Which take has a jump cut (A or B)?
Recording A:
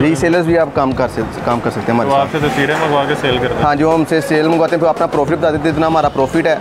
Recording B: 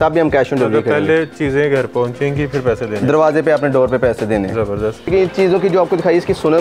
B